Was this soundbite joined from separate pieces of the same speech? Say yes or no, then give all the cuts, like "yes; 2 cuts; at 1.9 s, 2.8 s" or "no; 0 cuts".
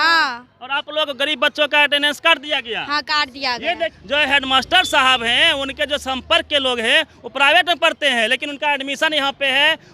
yes; 1 cut; at 4.0 s